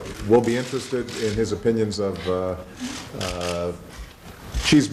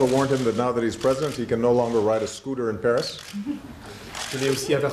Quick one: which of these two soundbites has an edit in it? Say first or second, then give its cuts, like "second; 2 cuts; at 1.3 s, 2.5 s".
first; 1 cut; at 3.3 s